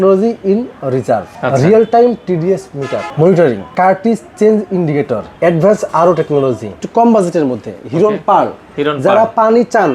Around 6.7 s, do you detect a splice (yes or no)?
yes